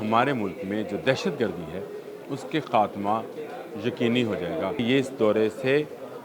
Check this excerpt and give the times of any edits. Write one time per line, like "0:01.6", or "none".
0:04.8